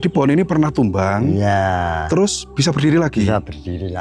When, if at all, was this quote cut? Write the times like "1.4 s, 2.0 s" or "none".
none